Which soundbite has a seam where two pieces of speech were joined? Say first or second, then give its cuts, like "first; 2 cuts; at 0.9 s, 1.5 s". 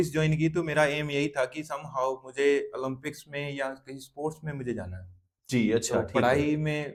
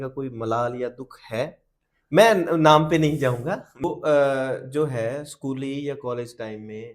second; 1 cut; at 3.7 s